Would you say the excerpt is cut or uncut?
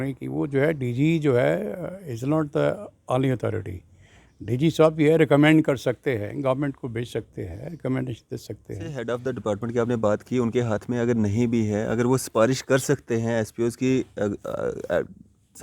cut